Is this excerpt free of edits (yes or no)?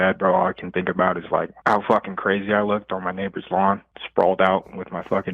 no